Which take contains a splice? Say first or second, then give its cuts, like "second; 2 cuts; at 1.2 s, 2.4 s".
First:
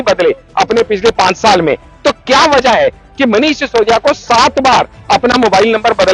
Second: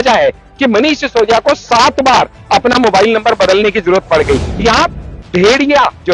second; 1 cut; at 4.5 s